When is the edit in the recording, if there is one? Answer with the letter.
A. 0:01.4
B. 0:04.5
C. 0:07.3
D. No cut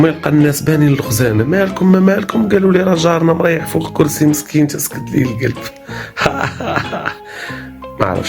C